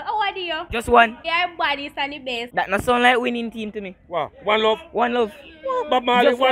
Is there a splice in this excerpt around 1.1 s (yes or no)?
no